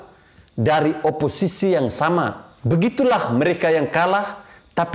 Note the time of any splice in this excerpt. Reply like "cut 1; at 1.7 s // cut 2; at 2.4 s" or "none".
cut 1; at 2.5 s